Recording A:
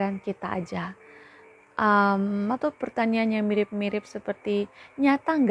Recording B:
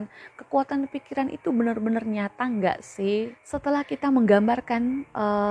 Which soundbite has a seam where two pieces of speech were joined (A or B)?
B